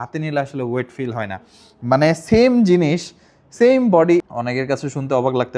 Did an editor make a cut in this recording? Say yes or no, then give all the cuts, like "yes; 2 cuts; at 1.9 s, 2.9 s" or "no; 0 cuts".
yes; 1 cut; at 4.3 s